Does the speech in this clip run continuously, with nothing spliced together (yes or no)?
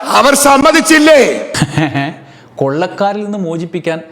no